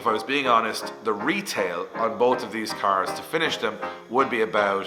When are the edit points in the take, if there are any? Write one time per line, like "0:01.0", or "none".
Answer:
none